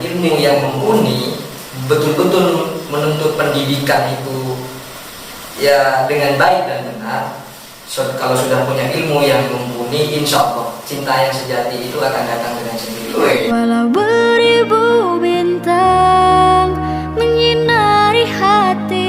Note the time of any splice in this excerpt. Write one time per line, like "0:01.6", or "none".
0:13.1